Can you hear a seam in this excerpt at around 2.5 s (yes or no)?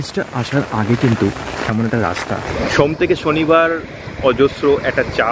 yes